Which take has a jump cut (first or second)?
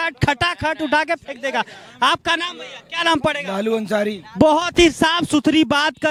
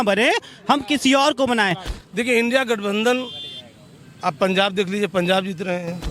second